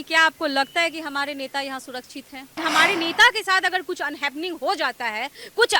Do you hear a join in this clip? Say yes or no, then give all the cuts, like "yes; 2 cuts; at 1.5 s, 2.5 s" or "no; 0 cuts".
yes; 1 cut; at 2.6 s